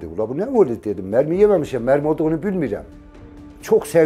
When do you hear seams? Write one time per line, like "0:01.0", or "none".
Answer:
0:03.0